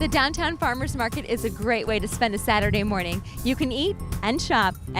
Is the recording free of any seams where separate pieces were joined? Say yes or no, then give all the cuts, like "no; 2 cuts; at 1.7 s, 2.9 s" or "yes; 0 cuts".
yes; 0 cuts